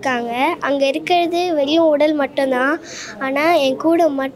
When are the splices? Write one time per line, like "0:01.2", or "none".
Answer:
none